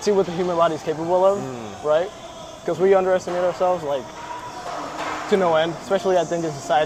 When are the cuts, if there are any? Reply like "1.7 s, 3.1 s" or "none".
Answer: none